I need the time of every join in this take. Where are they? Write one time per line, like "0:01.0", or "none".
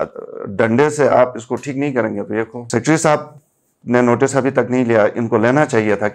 0:02.6